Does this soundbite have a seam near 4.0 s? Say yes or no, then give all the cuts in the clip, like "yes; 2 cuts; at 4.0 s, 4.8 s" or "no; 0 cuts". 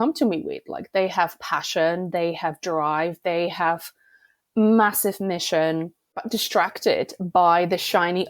no; 1 cut; at 6.2 s